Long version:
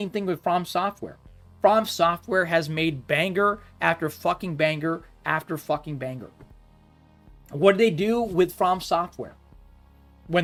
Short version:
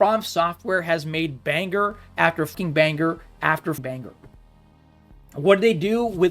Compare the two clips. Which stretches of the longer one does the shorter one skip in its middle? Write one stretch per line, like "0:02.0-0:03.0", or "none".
0:04.2-0:04.4
0:05.6-0:06.0